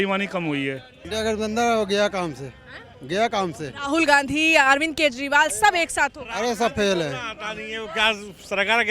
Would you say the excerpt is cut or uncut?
cut